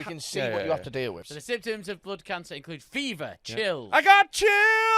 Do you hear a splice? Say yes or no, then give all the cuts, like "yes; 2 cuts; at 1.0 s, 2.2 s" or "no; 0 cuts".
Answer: yes; 1 cut; at 1.2 s